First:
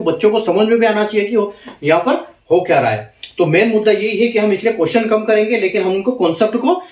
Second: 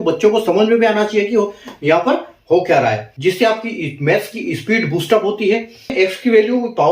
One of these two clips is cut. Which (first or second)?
second